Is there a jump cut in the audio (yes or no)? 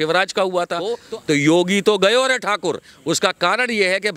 yes